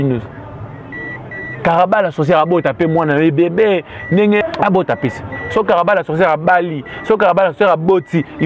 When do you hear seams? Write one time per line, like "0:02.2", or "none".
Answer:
0:04.4